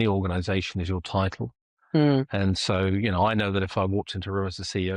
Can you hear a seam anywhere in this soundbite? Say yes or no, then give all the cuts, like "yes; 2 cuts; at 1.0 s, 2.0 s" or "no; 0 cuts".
no; 0 cuts